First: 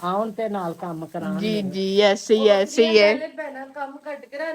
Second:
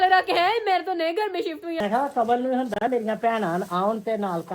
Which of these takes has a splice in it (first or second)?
second